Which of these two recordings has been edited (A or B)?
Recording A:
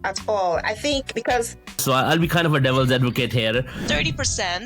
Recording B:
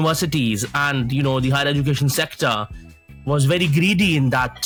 A